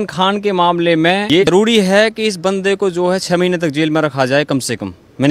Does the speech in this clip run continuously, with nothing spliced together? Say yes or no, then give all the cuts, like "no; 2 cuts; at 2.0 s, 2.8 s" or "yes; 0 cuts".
no; 1 cut; at 1.5 s